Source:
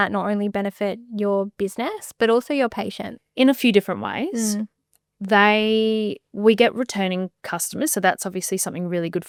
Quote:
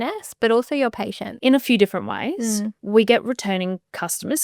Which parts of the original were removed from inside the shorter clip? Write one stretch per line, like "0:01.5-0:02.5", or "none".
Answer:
0:03.0-0:03.2
0:04.7-0:06.3